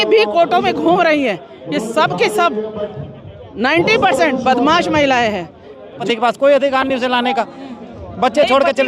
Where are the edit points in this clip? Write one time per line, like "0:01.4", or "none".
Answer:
0:06.0